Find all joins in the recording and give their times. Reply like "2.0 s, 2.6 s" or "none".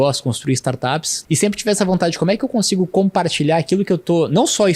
1.1 s